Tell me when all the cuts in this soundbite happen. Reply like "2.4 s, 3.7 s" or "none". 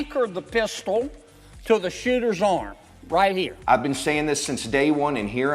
3.6 s